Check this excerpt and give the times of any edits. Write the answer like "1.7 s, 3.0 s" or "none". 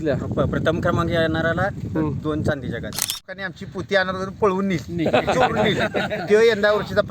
3.3 s